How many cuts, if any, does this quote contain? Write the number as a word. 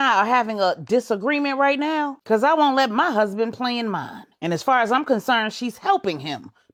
zero